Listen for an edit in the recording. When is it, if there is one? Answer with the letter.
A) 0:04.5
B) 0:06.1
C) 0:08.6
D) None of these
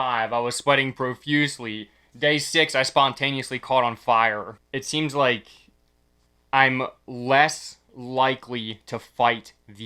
A